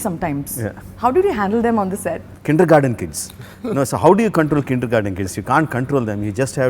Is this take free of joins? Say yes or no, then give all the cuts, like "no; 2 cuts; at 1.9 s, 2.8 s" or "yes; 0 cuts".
no; 1 cut; at 2.3 s